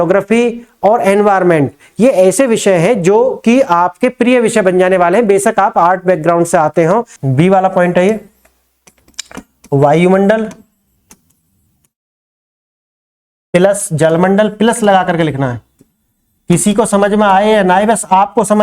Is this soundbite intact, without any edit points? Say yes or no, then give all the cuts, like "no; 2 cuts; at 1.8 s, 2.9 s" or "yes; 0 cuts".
no; 1 cut; at 7.2 s